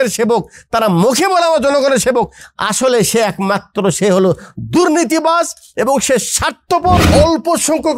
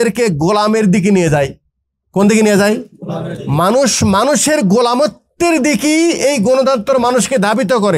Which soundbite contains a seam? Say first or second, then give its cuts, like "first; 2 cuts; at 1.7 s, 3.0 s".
first; 1 cut; at 7.1 s